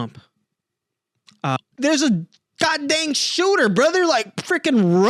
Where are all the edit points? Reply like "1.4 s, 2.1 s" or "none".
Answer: 1.6 s